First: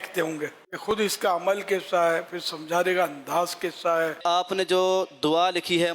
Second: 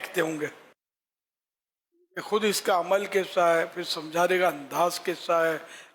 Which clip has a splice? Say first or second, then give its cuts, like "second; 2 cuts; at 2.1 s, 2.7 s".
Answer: first; 2 cuts; at 0.9 s, 4.2 s